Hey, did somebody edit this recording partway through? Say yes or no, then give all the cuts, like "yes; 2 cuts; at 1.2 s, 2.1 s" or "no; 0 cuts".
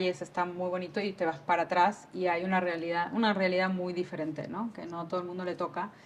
no; 0 cuts